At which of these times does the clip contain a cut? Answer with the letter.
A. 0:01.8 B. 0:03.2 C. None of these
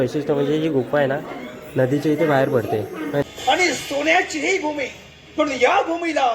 B